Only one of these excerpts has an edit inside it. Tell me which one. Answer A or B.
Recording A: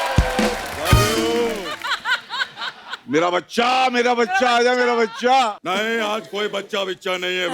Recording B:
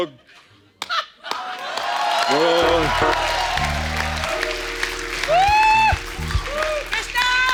A